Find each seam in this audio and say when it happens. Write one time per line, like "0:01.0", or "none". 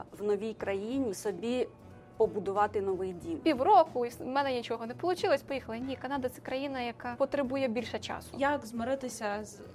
0:01.1
0:03.4
0:07.0
0:08.3